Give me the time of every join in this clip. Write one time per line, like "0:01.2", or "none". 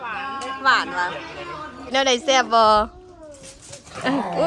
0:01.9